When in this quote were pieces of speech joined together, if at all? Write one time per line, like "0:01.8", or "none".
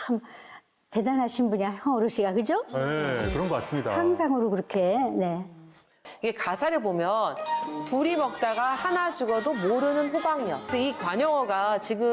0:06.1
0:10.6